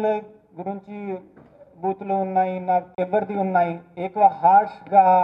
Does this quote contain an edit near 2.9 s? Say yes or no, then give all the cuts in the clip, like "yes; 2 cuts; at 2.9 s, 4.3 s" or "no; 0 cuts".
yes; 1 cut; at 2.9 s